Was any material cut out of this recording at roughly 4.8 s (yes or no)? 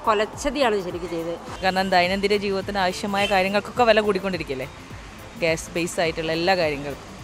no